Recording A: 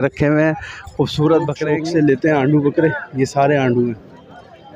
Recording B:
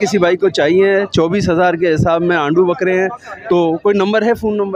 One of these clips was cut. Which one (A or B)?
A